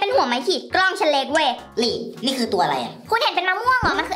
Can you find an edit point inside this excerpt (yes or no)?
yes